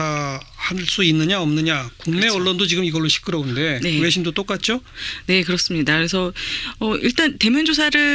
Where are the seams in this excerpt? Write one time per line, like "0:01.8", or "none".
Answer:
none